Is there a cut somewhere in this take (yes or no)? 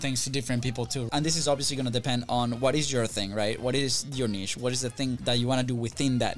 yes